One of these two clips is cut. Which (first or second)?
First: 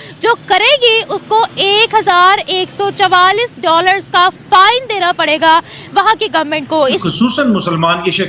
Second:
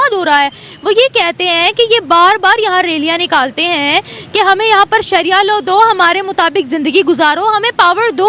first